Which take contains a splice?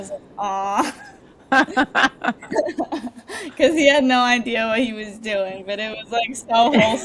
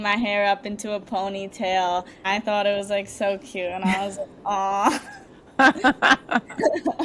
second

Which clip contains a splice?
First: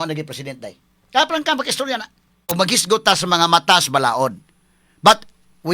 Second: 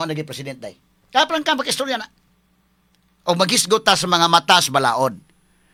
first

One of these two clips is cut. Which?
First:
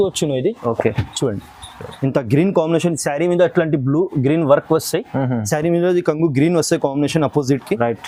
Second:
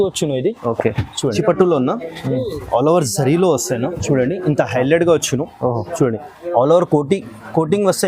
second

